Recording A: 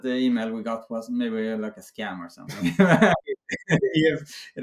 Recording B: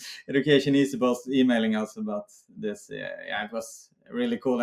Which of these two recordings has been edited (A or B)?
A